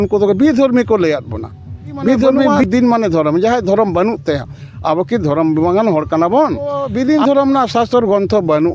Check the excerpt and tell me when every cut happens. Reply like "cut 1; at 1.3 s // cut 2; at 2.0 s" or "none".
cut 1; at 2.5 s // cut 2; at 6.8 s